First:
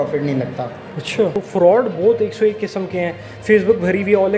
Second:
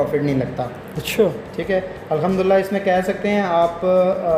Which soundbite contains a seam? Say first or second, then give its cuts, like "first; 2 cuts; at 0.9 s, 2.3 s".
first; 1 cut; at 1.4 s